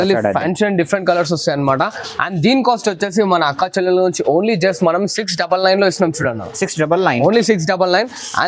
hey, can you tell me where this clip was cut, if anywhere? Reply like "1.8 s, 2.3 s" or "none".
none